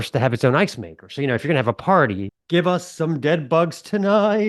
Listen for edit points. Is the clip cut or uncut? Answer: cut